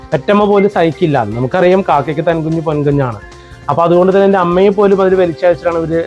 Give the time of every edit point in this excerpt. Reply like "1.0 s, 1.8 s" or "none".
1.5 s